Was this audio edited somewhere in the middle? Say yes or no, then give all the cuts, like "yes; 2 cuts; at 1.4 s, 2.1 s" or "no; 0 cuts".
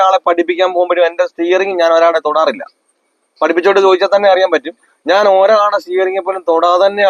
no; 0 cuts